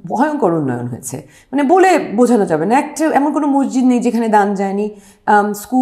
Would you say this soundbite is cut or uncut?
uncut